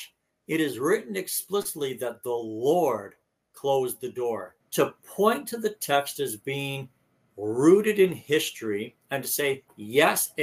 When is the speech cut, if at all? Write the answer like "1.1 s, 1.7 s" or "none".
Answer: 4.6 s